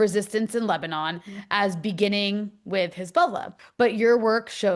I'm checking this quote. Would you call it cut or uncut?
cut